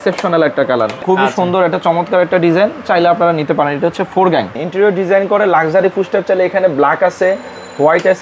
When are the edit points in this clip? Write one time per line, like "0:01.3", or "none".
0:01.0
0:04.6